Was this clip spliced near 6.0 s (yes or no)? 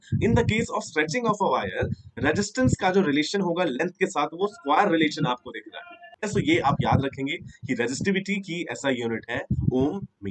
yes